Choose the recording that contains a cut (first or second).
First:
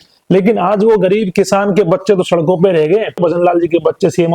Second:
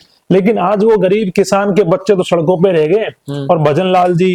first